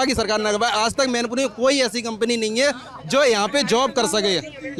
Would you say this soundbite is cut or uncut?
uncut